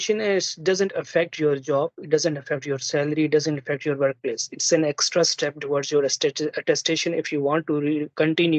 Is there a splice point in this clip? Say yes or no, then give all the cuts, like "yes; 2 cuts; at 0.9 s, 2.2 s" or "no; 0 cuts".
no; 0 cuts